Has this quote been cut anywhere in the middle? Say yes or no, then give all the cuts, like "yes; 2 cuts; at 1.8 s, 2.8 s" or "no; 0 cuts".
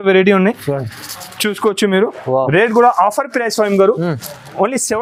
no; 0 cuts